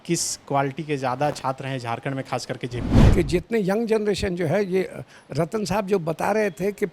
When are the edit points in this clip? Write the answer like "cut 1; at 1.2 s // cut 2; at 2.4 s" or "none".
cut 1; at 2.9 s